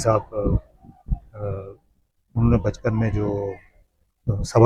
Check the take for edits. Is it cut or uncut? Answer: uncut